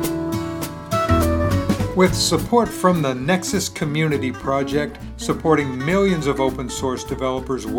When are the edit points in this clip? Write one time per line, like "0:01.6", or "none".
0:01.9